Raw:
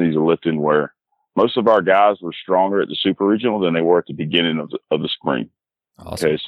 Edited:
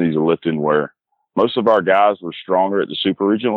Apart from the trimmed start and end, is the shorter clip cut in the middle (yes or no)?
no